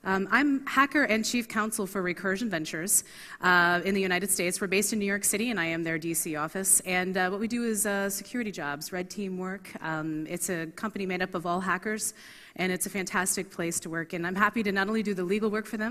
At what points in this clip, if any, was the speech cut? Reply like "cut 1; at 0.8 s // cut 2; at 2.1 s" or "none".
none